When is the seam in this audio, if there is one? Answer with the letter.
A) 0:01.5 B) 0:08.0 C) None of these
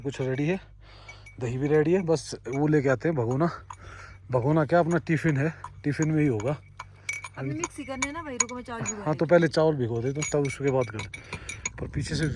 C